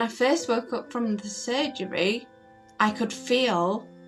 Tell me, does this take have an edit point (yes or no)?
no